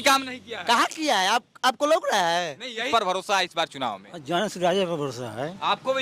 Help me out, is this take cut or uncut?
cut